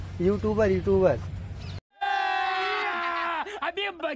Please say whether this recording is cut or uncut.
uncut